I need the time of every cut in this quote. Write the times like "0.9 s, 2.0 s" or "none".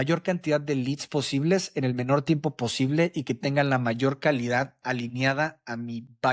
none